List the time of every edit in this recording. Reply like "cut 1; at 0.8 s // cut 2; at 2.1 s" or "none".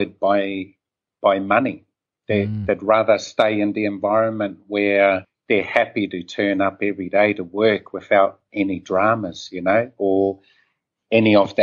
cut 1; at 5.3 s

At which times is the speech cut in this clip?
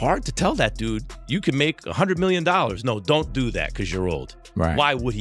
none

